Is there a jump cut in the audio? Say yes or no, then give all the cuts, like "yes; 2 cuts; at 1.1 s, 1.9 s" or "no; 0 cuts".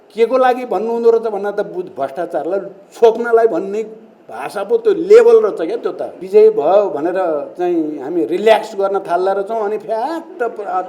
yes; 1 cut; at 6.1 s